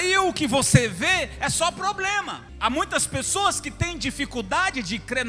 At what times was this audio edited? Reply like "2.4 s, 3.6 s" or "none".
2.5 s